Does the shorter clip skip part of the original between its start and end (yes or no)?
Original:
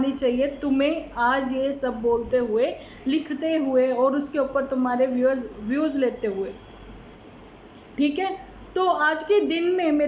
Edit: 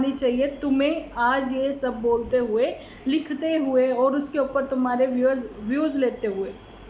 no